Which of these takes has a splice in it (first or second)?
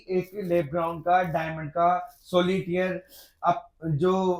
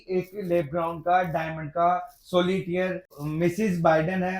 second